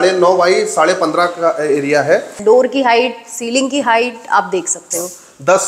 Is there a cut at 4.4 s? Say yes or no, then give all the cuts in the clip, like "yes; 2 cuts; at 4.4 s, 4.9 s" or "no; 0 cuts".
no; 1 cut; at 2.3 s